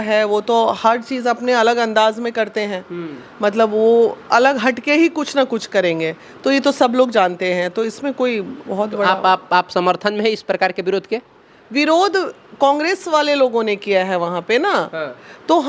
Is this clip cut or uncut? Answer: uncut